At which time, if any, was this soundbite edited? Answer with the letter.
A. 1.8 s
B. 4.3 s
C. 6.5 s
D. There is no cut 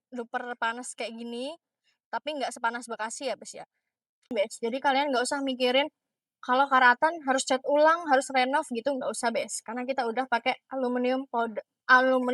B